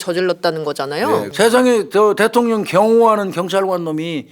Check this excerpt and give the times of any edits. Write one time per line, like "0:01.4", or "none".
0:01.3

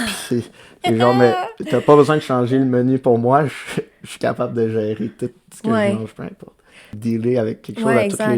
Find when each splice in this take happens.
0:06.9

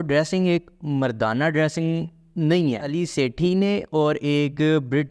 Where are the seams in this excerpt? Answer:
0:02.9

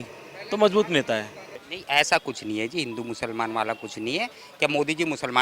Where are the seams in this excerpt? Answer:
0:01.5

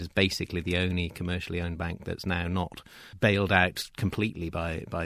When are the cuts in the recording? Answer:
none

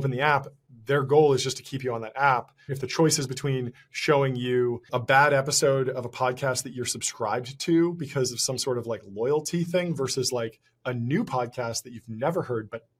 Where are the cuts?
0:02.8
0:04.9

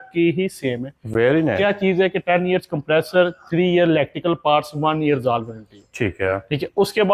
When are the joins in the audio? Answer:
none

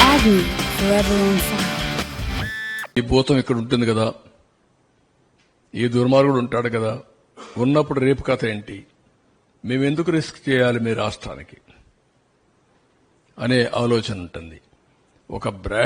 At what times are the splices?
0:02.9

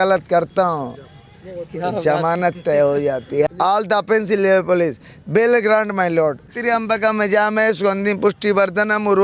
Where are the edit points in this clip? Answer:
0:03.5
0:06.5

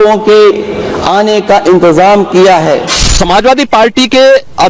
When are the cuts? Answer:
0:03.0

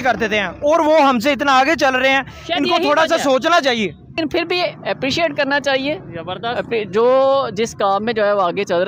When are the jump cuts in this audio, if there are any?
0:04.1

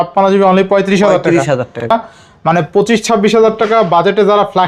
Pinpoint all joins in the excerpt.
0:01.9

